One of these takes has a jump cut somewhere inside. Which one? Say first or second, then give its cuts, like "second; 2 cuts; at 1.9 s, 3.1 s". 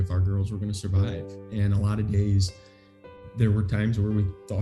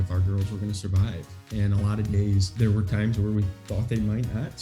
second; 1 cut; at 2.5 s